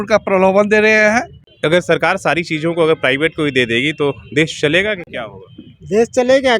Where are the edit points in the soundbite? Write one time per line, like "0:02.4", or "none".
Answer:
0:01.4